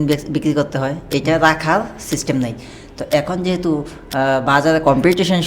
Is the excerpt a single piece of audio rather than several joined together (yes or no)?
yes